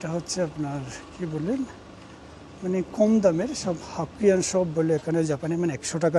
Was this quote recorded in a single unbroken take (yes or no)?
yes